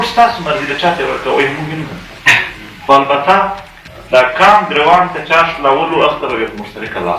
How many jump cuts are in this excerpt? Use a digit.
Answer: 0